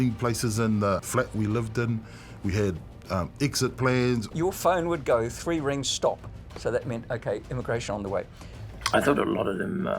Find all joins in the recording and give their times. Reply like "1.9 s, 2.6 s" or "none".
1.0 s, 4.3 s, 8.4 s